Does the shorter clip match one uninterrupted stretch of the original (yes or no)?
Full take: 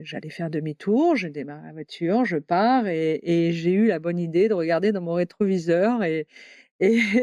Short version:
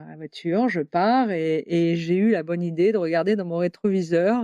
yes